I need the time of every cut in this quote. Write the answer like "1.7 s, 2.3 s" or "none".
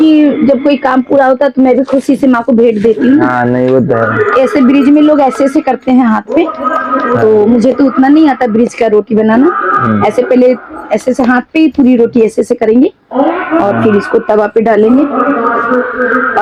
none